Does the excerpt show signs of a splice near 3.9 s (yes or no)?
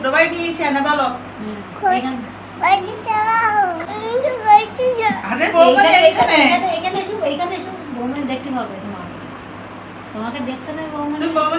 yes